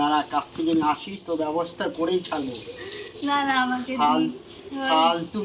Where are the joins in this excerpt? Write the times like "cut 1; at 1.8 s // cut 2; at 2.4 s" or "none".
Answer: none